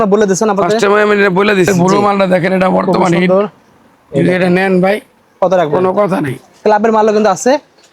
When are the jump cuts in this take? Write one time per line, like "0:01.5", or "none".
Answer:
0:01.7
0:06.4